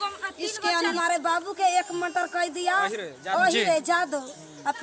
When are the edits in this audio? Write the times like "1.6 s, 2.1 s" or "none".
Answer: 0.9 s